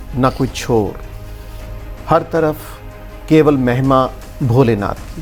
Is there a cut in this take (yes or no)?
no